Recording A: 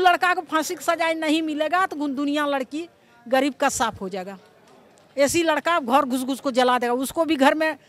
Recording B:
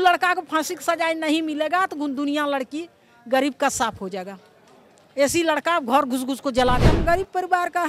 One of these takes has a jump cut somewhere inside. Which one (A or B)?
B